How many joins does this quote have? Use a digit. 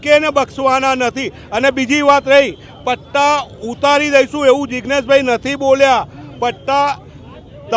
0